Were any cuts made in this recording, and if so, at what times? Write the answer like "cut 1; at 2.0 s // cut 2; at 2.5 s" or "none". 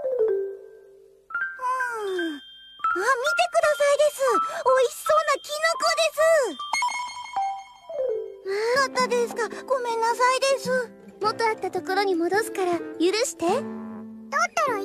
none